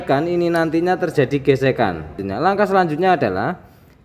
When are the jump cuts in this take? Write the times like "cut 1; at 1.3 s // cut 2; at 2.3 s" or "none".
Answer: cut 1; at 2.2 s